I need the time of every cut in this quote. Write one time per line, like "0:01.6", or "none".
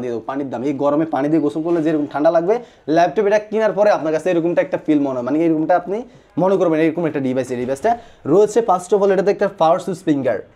none